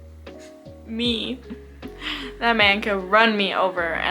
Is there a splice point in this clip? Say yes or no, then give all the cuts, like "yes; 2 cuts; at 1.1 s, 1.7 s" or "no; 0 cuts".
yes; 1 cut; at 1.4 s